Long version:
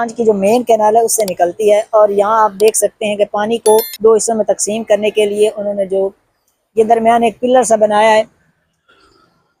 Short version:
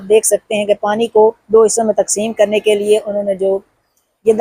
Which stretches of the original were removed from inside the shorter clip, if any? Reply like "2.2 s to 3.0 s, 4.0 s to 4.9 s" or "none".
none